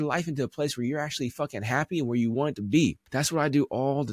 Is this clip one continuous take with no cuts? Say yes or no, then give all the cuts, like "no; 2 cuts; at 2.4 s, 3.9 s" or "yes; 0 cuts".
no; 1 cut; at 3.0 s